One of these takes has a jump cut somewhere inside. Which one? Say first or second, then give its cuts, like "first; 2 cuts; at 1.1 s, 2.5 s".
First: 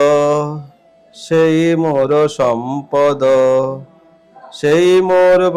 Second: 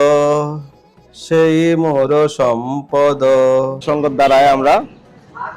second; 1 cut; at 3.8 s